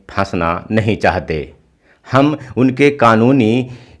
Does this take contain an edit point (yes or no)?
no